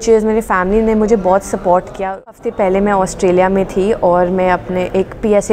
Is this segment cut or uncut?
cut